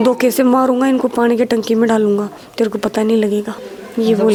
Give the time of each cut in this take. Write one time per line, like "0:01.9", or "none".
none